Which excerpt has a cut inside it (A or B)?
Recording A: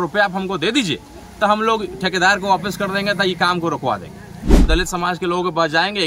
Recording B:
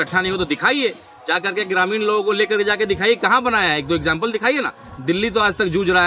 A